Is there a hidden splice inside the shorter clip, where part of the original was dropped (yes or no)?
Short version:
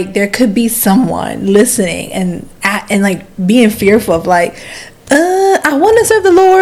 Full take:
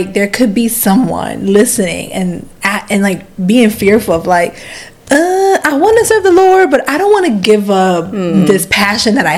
no